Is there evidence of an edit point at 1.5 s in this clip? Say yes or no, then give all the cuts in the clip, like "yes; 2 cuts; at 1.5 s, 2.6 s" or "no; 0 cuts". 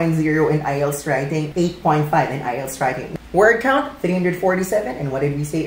yes; 2 cuts; at 1.5 s, 3.0 s